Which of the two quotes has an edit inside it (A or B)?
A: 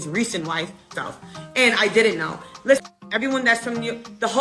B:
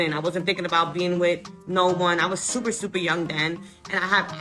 A